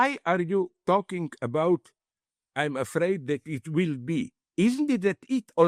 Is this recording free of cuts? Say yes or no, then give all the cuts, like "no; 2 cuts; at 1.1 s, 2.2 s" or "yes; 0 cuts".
yes; 0 cuts